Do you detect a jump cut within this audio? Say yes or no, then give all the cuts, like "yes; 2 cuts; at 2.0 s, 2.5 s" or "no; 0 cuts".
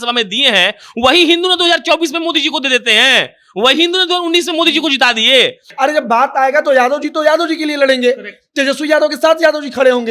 yes; 1 cut; at 5.6 s